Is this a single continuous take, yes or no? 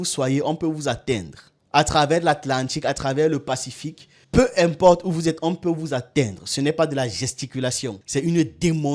yes